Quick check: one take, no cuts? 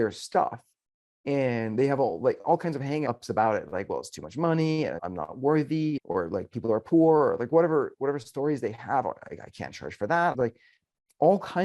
no; 4 cuts; at 3.0 s, 5.0 s, 6.0 s, 10.3 s

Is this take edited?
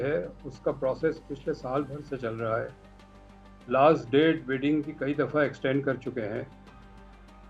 no; 0 cuts

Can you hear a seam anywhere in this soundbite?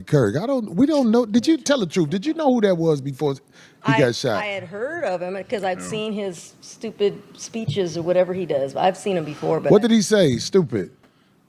no; 0 cuts

